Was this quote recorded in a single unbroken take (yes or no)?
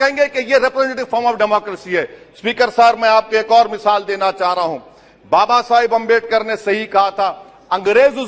yes